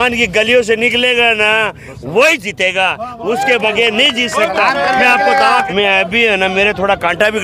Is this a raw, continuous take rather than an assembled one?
no; 1 cut; at 5.7 s

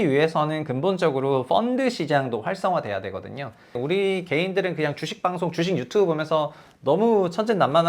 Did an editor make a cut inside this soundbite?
yes; 1 cut; at 3.8 s

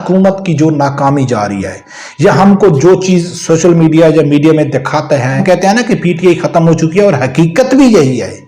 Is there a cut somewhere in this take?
yes; 1 cut; at 5.4 s

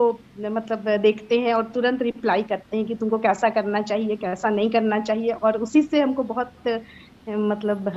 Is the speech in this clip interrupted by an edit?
no; 0 cuts

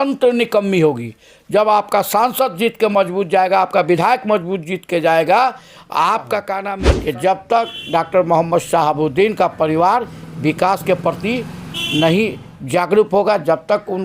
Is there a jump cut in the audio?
yes; 1 cut; at 6.6 s

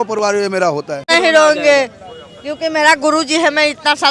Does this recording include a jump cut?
yes; 1 cut; at 1.1 s

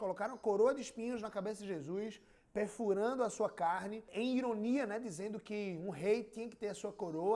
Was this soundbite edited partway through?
yes; 1 cut; at 4.1 s

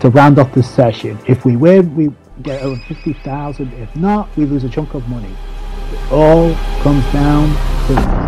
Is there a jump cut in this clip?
no; 0 cuts

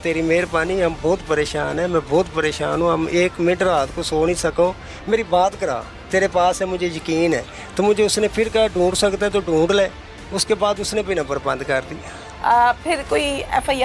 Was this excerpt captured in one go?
yes; 0 cuts

